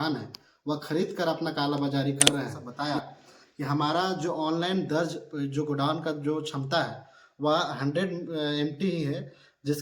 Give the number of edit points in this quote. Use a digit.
1